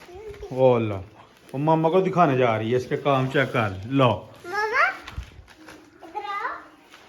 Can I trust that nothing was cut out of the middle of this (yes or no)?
yes